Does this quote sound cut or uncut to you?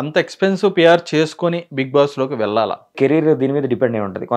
cut